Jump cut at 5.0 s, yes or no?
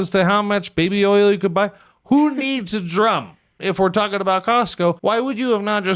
yes